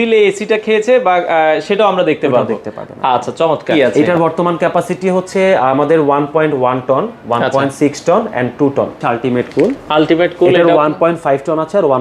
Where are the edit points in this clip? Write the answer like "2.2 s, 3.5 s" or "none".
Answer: 3.9 s, 9.0 s